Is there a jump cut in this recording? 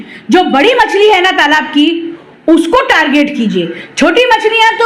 no; 0 cuts

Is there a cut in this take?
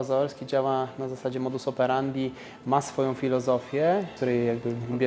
yes; 1 cut; at 4.1 s

